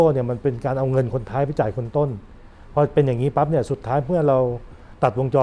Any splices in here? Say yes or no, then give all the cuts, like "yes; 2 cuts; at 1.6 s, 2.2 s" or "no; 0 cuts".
no; 0 cuts